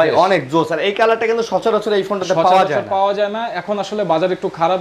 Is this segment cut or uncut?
uncut